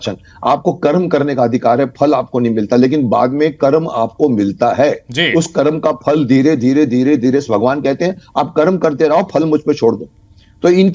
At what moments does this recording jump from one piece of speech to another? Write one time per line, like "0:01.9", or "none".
none